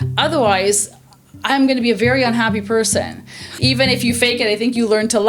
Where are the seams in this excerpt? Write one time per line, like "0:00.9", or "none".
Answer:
0:03.5